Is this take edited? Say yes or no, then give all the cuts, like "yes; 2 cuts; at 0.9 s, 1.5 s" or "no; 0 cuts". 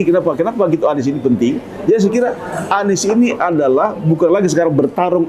no; 0 cuts